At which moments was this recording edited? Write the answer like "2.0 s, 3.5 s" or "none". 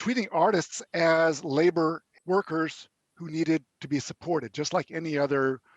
2.1 s